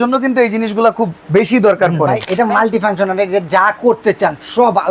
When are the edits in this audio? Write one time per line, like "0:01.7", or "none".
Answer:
0:02.2